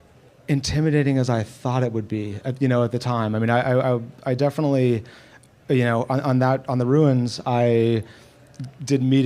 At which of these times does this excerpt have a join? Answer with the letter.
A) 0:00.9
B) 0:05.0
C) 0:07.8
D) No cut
D